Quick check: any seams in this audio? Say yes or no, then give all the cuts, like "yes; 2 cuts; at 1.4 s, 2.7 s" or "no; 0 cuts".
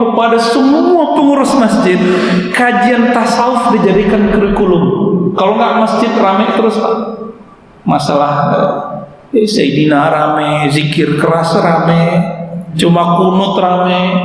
no; 0 cuts